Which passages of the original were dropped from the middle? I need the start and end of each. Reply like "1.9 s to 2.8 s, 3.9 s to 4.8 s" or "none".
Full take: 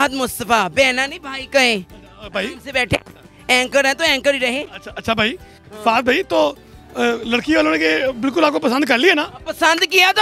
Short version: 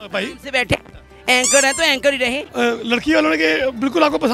4.7 s to 6.9 s